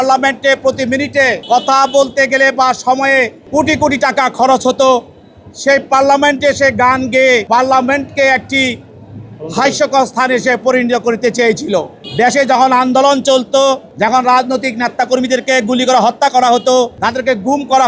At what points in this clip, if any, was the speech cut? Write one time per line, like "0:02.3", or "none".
0:01.4
0:03.4
0:07.4
0:12.0
0:13.9
0:17.0